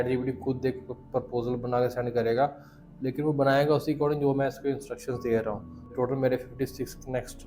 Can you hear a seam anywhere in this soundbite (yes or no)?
yes